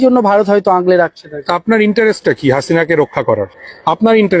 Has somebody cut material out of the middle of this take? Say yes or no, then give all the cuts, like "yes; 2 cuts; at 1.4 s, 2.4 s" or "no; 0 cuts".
no; 0 cuts